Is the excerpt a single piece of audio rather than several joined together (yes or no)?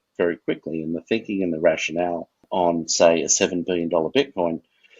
no